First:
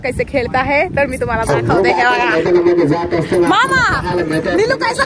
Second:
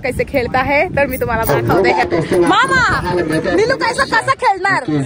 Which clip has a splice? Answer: second; 1 cut; at 2.0 s

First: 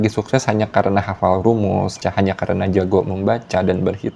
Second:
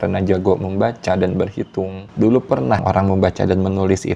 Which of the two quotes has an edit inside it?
second; 1 cut; at 2.8 s

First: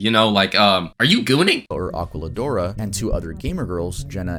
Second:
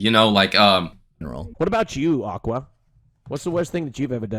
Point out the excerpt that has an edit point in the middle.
second; 1 cut; at 0.9 s

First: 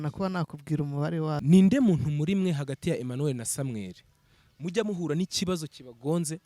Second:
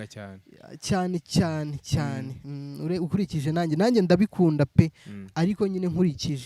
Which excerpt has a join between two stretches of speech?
first; 1 cut; at 1.4 s

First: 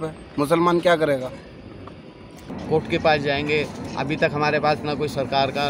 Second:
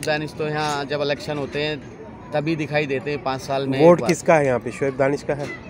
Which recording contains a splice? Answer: first; 1 cut; at 2.4 s

